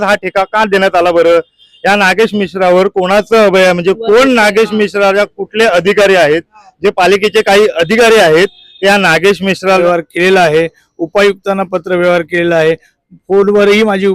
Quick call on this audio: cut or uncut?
cut